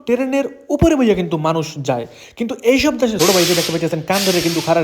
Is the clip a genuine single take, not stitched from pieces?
no; 1 cut; at 3.1 s

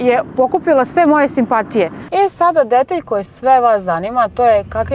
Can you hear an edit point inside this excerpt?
yes; 1 cut; at 2.0 s

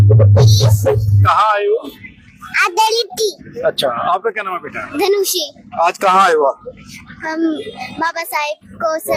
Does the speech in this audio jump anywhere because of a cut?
no; 0 cuts

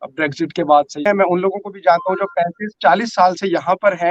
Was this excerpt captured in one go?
no; 1 cut; at 1.1 s

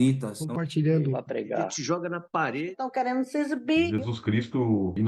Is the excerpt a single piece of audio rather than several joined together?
yes; 0 cuts

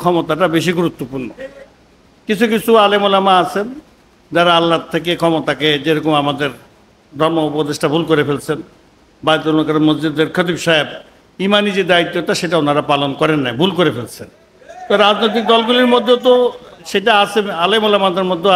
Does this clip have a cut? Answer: yes; 1 cut; at 1.7 s

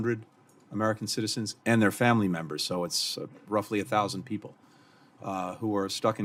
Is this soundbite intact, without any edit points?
yes; 0 cuts

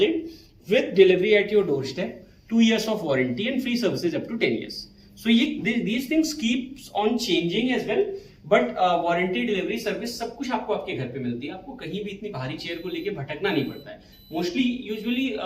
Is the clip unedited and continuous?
yes; 0 cuts

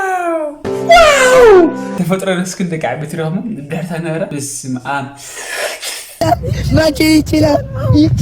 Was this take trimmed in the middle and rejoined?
yes; 1 cut; at 6.2 s

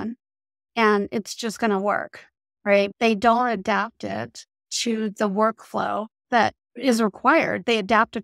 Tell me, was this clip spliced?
yes; 2 cuts; at 2.9 s, 6.7 s

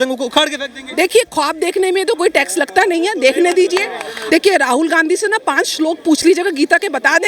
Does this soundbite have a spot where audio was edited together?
yes; 1 cut; at 4.1 s

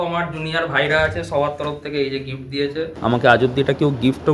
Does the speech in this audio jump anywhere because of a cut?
yes; 1 cut; at 2.9 s

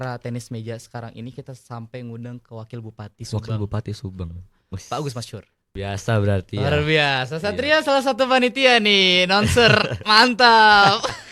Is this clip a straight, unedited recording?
no; 1 cut; at 5.6 s

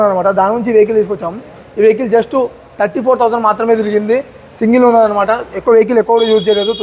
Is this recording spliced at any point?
no; 0 cuts

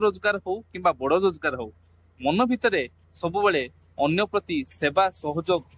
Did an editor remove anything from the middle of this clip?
no; 0 cuts

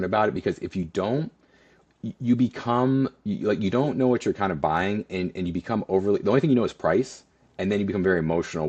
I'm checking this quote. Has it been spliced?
no; 0 cuts

